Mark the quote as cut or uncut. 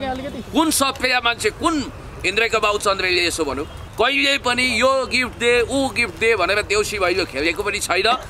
cut